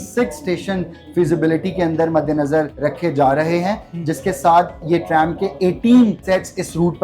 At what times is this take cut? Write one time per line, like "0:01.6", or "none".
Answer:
0:02.7
0:06.2